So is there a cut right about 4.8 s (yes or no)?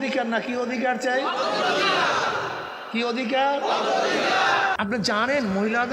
yes